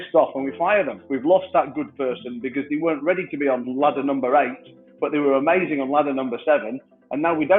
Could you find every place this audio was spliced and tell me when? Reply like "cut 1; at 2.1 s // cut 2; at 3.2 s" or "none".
cut 1; at 1.0 s // cut 2; at 3.7 s